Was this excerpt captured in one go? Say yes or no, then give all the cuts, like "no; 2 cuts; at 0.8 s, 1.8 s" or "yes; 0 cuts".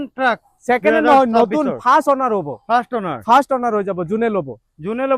yes; 0 cuts